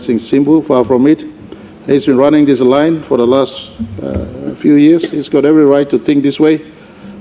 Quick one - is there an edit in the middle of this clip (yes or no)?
no